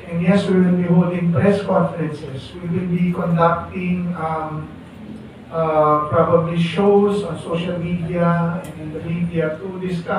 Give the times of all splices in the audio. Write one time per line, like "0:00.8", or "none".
none